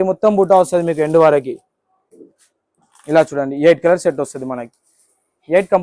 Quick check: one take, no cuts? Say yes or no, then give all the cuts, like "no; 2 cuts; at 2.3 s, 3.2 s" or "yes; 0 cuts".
no; 1 cut; at 2.4 s